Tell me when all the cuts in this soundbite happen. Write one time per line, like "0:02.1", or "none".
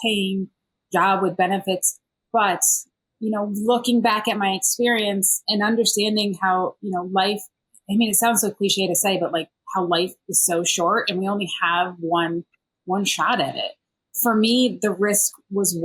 none